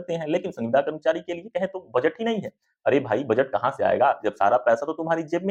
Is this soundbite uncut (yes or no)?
yes